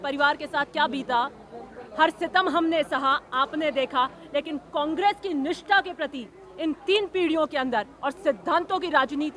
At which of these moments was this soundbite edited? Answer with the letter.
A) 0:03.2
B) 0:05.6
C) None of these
C